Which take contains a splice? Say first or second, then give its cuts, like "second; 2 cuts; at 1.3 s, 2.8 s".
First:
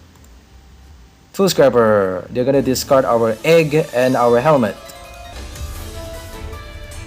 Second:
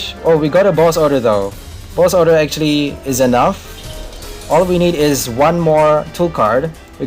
first; 1 cut; at 5.3 s